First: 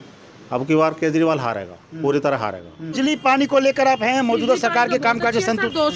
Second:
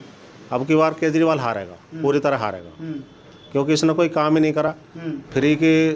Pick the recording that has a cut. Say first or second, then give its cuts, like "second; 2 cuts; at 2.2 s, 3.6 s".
first; 1 cut; at 3.0 s